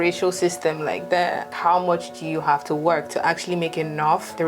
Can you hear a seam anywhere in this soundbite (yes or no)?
yes